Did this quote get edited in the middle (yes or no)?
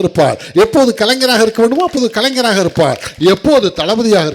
no